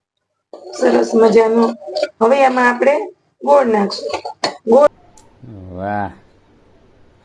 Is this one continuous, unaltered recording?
no; 1 cut; at 4.9 s

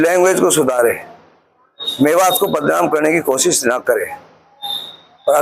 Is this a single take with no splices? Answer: yes; 0 cuts

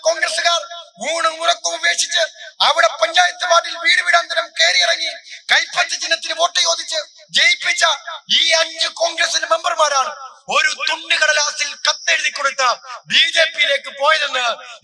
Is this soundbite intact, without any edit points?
yes; 0 cuts

